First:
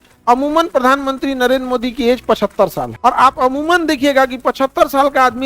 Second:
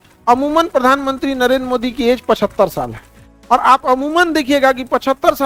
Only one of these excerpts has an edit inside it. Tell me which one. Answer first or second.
first